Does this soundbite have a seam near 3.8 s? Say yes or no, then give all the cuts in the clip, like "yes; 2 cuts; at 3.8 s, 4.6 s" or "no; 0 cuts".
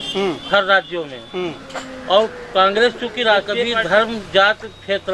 yes; 1 cut; at 3.8 s